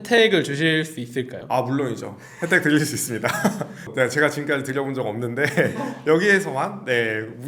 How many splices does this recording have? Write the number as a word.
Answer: zero